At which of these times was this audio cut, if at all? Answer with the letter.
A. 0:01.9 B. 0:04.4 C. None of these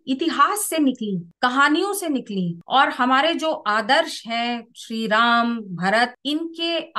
C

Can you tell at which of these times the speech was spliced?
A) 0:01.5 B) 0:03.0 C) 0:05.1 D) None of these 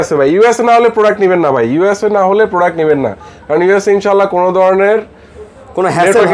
D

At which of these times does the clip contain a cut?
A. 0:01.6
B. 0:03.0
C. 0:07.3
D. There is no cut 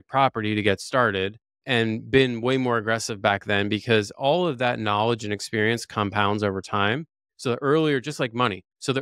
A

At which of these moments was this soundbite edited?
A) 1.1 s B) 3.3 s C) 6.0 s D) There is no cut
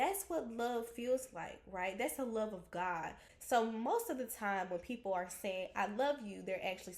B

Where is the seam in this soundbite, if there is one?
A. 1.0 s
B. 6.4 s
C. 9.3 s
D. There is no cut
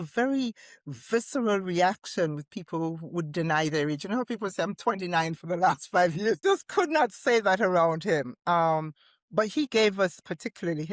B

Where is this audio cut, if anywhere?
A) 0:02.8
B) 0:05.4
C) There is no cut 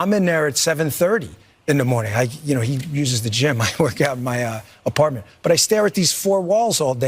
A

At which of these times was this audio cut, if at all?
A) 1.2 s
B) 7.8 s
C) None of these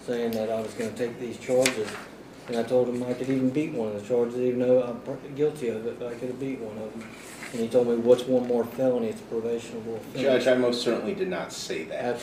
C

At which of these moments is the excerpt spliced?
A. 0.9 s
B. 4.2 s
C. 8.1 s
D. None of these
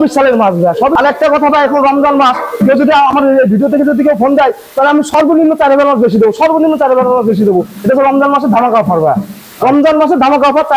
A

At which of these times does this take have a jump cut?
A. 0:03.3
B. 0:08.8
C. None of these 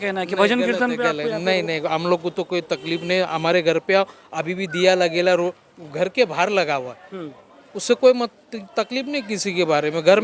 C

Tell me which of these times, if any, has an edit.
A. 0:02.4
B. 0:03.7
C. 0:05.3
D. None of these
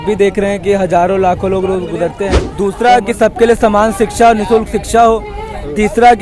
A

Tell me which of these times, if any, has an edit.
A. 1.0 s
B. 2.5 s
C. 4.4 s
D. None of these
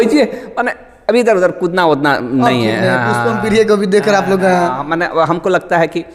D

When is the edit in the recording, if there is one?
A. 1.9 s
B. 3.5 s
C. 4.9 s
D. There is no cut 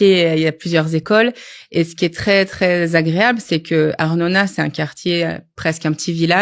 D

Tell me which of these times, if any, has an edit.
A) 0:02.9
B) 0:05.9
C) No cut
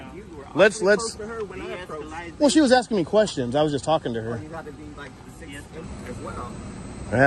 B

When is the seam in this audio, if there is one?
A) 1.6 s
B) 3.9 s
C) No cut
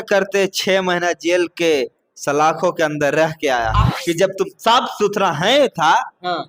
B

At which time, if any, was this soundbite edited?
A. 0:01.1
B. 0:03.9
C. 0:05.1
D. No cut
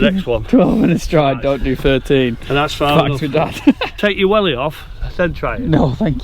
B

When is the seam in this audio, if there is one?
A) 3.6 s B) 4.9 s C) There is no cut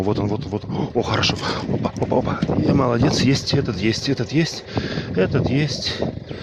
C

